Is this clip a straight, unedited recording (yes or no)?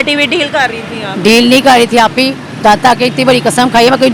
yes